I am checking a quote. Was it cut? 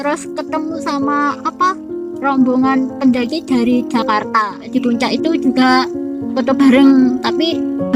yes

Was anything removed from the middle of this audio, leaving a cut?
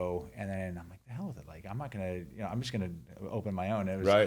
no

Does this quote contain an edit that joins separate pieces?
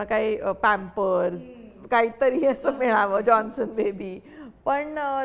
no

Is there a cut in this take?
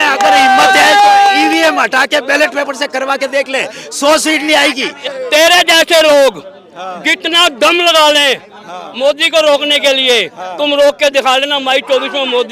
yes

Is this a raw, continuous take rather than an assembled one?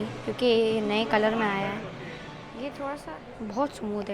no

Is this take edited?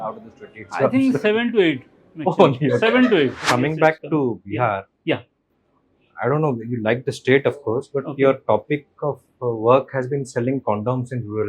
yes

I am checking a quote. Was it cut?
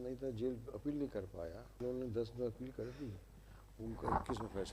yes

